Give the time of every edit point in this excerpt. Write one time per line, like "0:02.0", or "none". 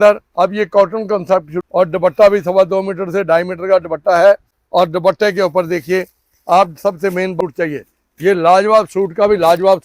0:01.6
0:04.5
0:07.3